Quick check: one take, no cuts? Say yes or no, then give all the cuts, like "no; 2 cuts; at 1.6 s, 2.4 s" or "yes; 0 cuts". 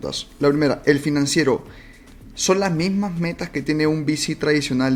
yes; 0 cuts